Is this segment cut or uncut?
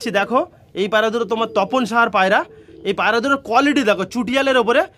uncut